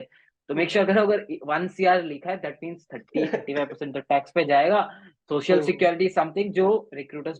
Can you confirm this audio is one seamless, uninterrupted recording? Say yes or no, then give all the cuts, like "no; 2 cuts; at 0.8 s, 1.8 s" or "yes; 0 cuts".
yes; 0 cuts